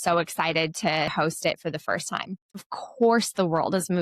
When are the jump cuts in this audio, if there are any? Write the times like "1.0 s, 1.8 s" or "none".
1.1 s, 2.6 s